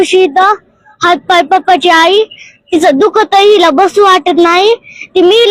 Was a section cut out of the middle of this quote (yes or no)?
no